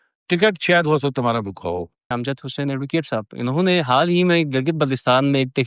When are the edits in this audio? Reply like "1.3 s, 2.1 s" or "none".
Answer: 2.1 s

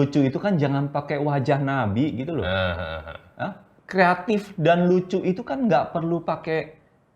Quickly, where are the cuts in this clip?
3.7 s

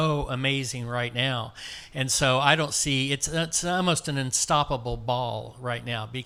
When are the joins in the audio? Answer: none

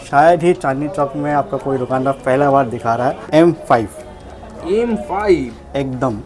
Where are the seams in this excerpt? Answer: 3.2 s

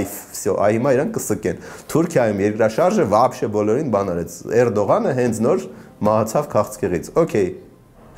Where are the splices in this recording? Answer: none

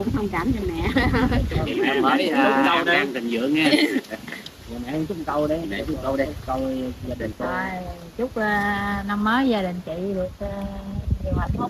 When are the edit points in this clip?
none

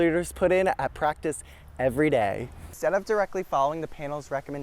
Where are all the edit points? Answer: 2.6 s

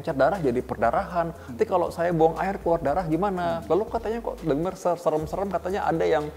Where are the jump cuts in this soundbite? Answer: none

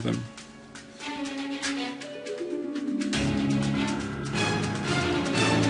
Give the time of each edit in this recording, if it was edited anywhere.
3.3 s

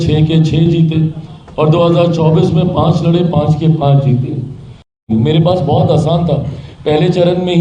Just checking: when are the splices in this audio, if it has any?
5.0 s

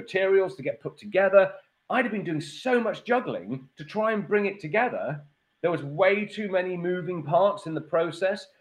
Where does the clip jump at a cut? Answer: 1.6 s

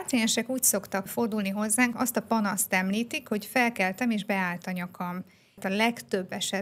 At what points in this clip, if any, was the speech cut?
1.1 s, 1.9 s, 5.6 s

